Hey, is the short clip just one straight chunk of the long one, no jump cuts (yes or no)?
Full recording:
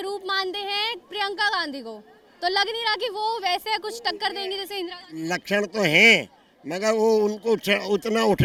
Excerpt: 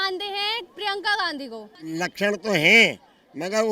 no